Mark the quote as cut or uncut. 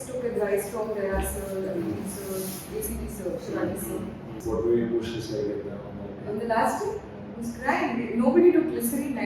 cut